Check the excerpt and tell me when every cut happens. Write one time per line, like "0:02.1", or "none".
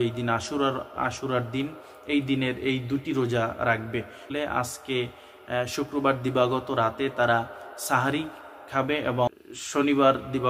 0:04.3
0:09.3

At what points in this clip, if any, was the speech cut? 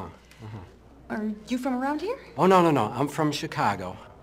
0:02.7

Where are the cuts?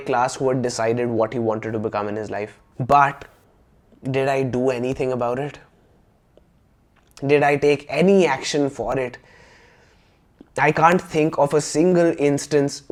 none

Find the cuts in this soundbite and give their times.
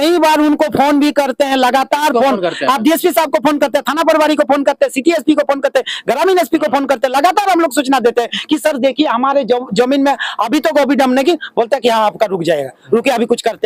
none

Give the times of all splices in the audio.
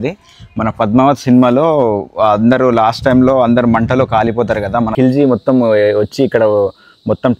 0:04.9

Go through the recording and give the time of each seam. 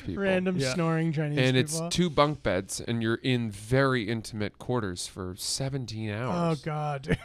none

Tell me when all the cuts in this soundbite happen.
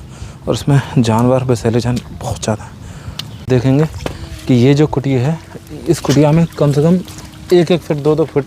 0:03.4

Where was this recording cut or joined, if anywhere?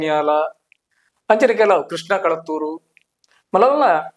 none

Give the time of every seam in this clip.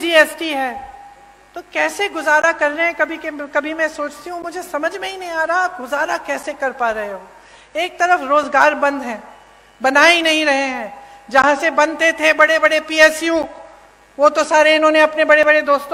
none

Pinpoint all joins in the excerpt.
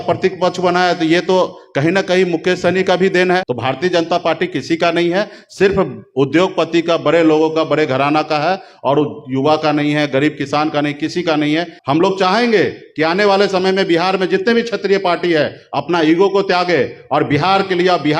0:03.5
0:11.7

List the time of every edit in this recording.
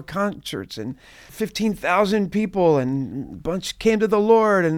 0:01.3

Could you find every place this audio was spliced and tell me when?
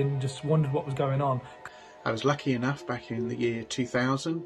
0:01.5

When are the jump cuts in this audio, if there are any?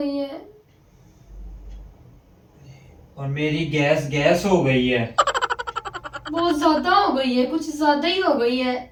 none

